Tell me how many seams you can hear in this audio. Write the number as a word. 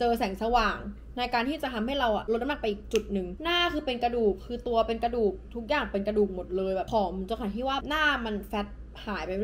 one